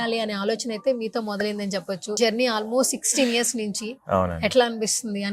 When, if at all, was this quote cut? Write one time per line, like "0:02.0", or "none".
0:02.2